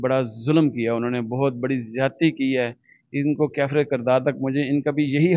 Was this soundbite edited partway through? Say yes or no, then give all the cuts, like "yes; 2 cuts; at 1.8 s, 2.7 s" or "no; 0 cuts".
no; 0 cuts